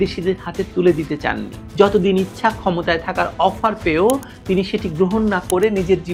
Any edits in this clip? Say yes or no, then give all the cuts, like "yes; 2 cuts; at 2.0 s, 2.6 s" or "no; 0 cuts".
no; 0 cuts